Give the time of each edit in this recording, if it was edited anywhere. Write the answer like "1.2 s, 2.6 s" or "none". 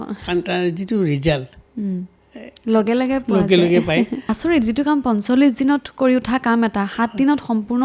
4.2 s